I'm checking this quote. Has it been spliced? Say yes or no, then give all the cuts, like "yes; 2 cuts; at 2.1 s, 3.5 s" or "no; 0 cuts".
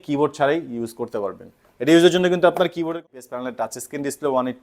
yes; 1 cut; at 2.8 s